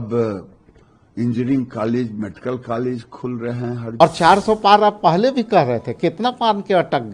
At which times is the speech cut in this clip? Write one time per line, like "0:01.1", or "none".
0:04.0